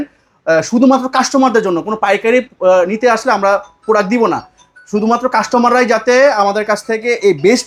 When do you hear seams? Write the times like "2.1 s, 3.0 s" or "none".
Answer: none